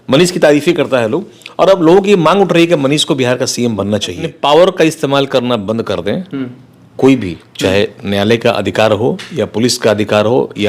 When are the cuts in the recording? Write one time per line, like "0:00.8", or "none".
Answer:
0:04.3